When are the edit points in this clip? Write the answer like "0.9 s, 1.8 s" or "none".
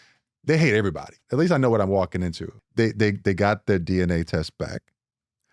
1.2 s, 2.5 s